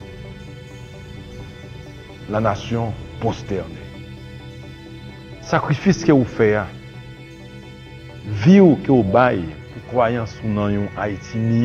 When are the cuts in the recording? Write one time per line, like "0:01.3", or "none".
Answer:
0:03.7
0:05.4